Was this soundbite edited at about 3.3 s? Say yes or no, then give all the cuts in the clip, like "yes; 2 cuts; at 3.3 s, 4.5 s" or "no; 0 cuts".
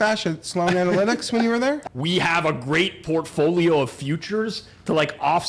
no; 1 cut; at 1.8 s